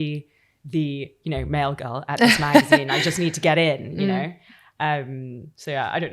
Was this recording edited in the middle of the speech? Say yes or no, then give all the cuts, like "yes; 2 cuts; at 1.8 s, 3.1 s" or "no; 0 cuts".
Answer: no; 0 cuts